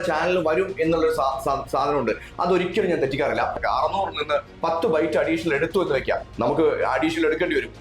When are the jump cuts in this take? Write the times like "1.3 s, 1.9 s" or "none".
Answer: 3.6 s